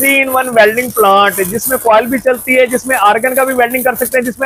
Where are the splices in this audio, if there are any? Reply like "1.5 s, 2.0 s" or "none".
none